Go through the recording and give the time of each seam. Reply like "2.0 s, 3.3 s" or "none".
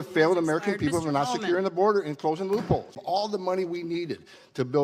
3.0 s